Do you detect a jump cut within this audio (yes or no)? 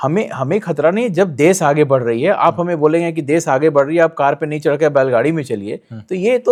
no